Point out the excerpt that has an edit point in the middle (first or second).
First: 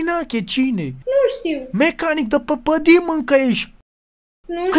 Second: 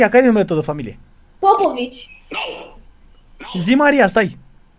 first